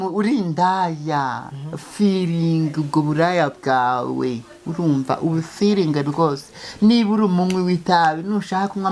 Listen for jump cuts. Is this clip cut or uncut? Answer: uncut